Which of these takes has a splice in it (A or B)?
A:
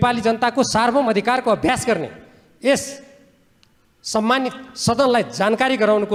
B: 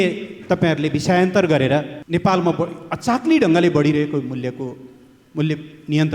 B